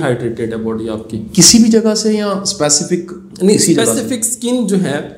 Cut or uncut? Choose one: uncut